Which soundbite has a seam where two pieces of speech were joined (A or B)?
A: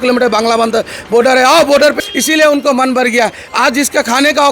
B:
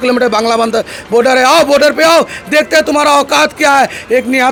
A